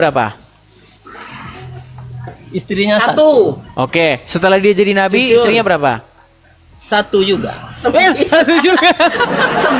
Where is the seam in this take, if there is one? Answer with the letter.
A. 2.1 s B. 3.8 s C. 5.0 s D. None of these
D